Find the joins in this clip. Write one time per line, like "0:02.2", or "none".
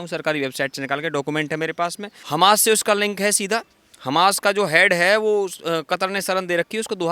0:02.1